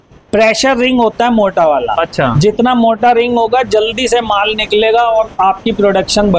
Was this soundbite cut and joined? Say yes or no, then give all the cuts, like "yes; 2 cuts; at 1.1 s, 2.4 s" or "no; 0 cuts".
no; 0 cuts